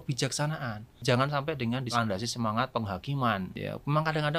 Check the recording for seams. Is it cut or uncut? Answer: cut